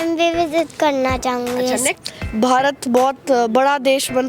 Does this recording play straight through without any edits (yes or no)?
no